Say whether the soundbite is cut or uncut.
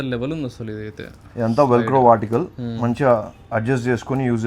uncut